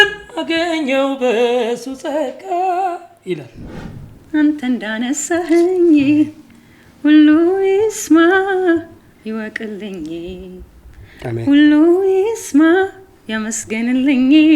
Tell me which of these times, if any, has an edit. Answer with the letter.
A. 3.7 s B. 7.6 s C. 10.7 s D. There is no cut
A